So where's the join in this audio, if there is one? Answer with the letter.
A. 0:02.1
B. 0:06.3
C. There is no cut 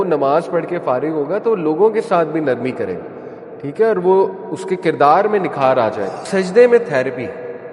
B